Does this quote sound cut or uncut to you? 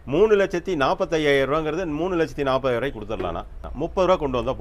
cut